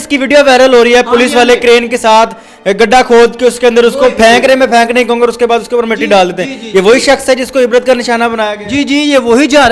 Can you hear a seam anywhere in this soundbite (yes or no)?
no